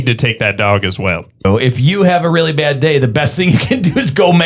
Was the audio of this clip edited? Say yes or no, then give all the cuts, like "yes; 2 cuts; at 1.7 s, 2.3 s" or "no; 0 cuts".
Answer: yes; 1 cut; at 1.4 s